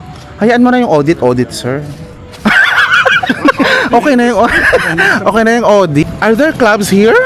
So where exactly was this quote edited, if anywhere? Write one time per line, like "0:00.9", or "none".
0:06.0